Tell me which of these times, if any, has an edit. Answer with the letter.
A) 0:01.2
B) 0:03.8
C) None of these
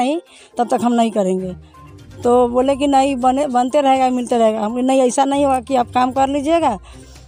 C